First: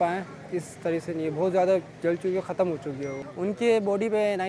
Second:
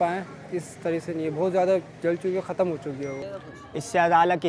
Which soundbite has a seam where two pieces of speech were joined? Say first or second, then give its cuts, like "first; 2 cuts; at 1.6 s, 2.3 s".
second; 1 cut; at 3.2 s